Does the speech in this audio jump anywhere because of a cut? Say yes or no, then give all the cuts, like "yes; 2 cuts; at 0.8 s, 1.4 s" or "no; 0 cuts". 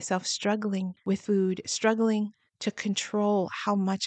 yes; 1 cut; at 0.9 s